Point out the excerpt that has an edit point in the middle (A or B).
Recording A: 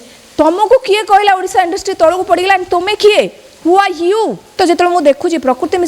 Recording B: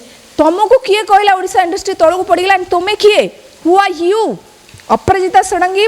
A